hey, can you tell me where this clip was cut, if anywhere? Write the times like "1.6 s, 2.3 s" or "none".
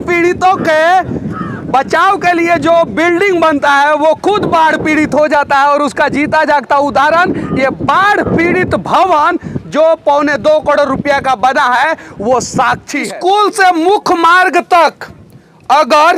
13.1 s

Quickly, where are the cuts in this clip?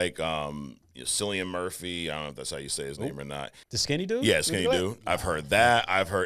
3.6 s

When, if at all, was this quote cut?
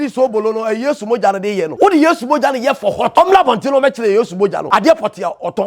1.7 s, 3.1 s, 4.6 s

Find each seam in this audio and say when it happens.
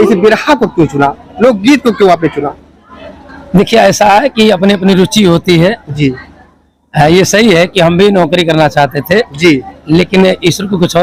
none

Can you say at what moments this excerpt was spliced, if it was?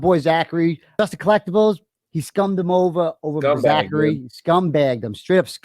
1.0 s

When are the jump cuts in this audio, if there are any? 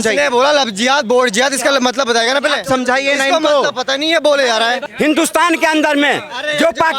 4.8 s

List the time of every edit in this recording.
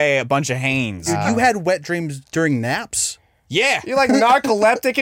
1.1 s

